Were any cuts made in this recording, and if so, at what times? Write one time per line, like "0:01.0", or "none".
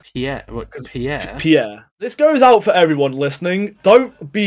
0:02.0